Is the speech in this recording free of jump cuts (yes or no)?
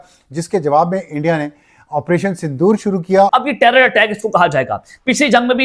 no